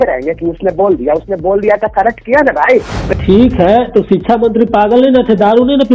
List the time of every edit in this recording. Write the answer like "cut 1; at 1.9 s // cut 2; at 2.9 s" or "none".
cut 1; at 3.0 s